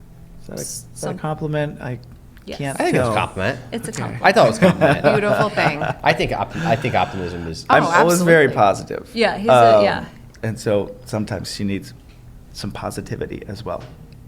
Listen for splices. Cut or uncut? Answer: uncut